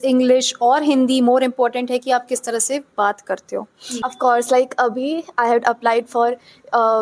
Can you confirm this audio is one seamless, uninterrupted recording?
no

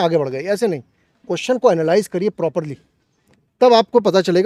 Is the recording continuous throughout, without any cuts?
yes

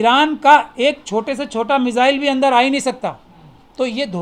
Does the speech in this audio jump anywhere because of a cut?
no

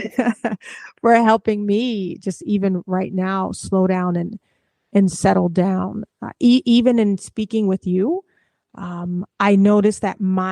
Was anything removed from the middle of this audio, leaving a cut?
no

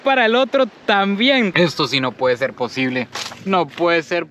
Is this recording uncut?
no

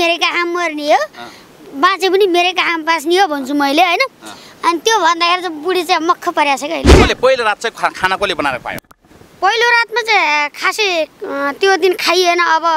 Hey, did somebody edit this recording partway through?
yes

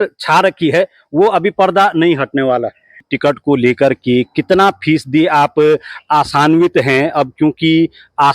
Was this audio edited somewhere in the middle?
yes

